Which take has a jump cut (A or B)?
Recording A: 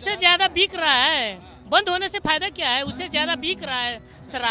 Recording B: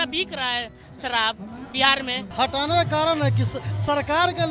B